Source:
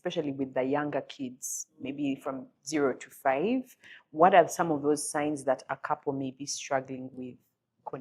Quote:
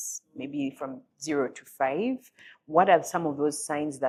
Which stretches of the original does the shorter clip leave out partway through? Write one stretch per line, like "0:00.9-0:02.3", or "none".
none

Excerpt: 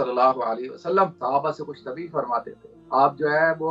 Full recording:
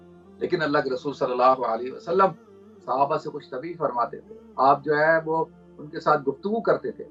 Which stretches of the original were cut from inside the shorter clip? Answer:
0:02.4-0:02.8

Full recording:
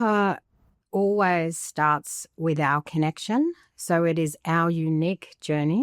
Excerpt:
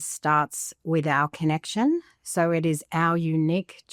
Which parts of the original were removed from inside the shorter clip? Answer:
none

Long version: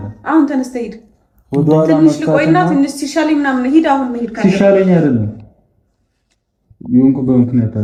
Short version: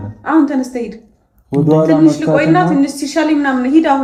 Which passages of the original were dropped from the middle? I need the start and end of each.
none

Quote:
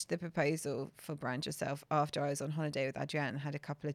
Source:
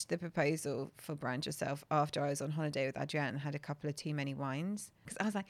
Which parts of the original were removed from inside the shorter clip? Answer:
none

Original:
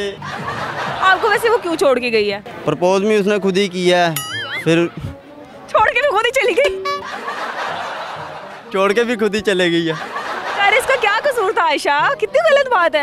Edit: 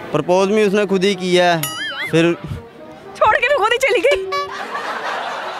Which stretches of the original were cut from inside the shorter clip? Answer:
none

